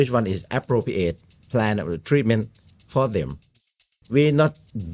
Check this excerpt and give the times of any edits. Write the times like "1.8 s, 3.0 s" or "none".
3.9 s